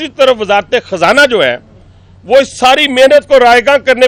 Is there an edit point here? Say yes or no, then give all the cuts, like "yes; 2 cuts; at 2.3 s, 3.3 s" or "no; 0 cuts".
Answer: no; 0 cuts